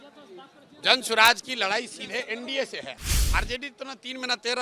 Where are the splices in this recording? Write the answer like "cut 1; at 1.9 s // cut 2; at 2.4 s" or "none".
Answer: cut 1; at 3.0 s